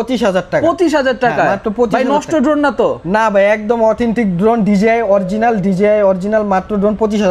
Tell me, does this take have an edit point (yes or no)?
no